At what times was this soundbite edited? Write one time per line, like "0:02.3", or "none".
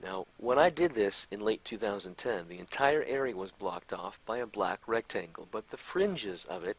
none